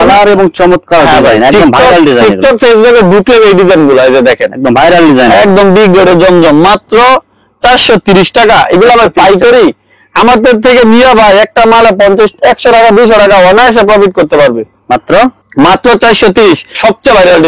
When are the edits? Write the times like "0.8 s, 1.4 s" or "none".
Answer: none